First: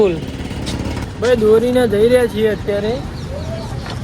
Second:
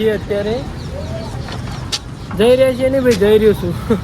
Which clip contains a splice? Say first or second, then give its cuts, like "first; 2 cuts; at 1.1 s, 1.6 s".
first; 1 cut; at 1.0 s